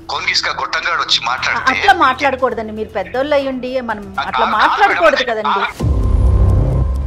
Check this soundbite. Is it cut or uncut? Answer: cut